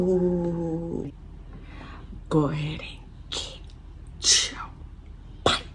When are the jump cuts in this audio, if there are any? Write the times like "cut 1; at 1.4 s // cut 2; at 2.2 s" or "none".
cut 1; at 1.0 s